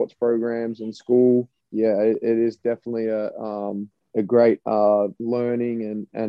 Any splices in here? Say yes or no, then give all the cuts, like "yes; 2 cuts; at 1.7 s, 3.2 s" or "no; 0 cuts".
yes; 3 cuts; at 1.6 s, 4.0 s, 5.2 s